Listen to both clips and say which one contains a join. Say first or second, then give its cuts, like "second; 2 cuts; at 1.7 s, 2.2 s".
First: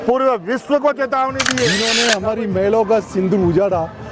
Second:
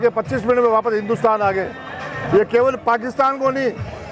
first; 1 cut; at 1.8 s